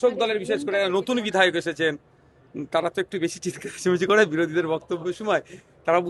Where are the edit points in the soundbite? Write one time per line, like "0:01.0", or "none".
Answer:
none